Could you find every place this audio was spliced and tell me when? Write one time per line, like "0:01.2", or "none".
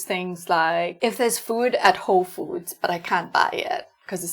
0:00.9